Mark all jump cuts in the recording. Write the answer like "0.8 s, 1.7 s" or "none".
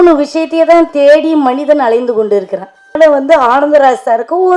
3.0 s